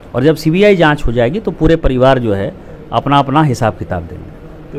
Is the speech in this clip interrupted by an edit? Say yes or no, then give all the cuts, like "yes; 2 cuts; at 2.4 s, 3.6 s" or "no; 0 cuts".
no; 0 cuts